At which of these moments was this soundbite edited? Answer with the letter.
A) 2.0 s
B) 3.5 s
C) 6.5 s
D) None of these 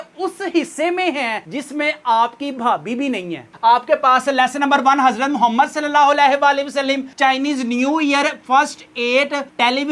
B